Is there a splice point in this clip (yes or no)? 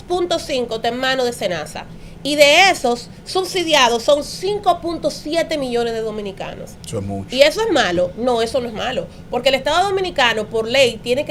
no